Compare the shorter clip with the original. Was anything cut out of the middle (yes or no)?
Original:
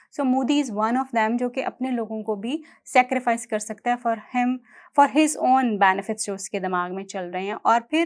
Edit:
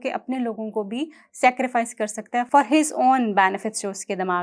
yes